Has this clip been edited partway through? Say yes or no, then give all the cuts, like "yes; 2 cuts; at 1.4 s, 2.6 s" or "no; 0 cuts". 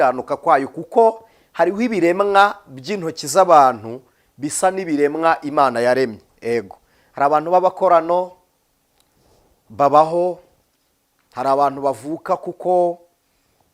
no; 0 cuts